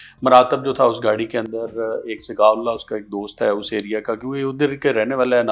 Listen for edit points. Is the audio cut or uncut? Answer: uncut